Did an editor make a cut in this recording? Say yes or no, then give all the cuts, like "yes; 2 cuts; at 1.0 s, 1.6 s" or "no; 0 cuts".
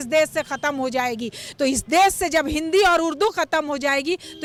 no; 0 cuts